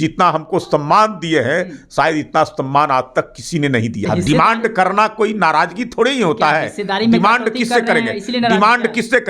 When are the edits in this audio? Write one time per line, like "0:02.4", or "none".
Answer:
0:04.0